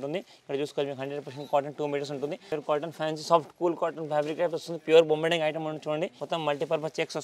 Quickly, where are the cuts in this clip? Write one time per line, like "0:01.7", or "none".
0:02.4
0:06.2